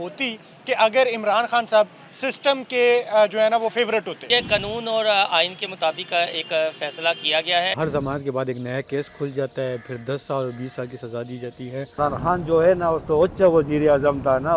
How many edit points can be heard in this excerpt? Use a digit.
3